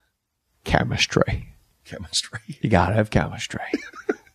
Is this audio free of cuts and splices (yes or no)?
yes